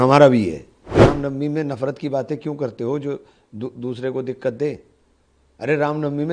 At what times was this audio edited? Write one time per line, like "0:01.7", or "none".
0:00.9